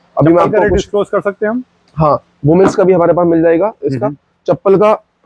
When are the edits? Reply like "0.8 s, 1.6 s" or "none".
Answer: none